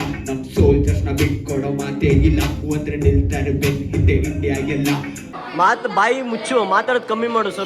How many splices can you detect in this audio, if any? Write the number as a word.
one